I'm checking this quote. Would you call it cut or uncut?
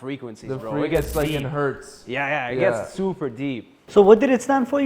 cut